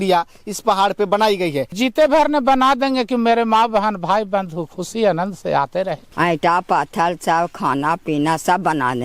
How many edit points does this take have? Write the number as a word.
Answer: two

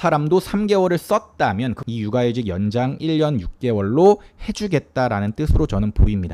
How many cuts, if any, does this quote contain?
one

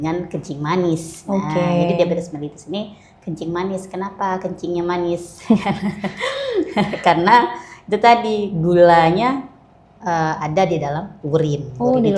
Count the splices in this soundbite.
zero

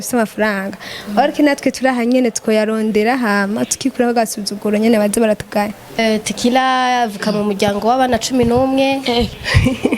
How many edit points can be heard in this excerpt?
one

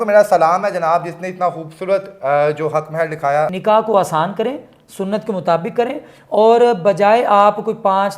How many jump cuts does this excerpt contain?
one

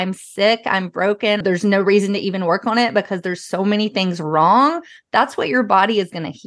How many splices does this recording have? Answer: one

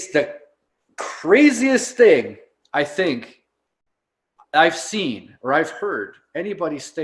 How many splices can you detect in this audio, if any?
zero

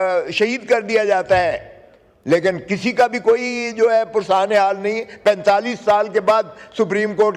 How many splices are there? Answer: zero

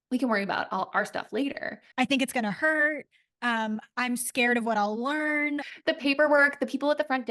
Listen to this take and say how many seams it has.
two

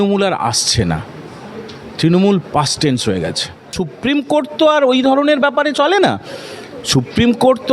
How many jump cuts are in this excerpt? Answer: one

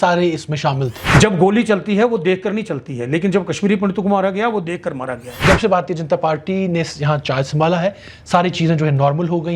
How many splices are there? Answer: two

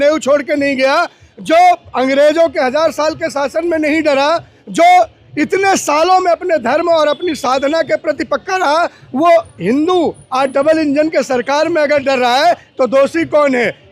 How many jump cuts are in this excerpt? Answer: zero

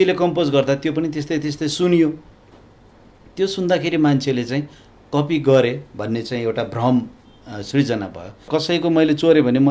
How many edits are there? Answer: one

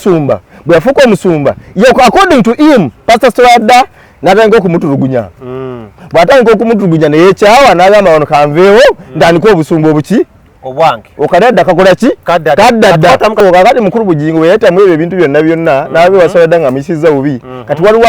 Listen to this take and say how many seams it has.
one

